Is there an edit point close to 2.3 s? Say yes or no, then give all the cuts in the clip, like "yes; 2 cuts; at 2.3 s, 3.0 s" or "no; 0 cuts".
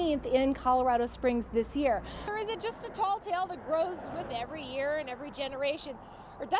yes; 1 cut; at 2.3 s